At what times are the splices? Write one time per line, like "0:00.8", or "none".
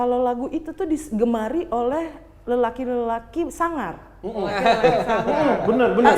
none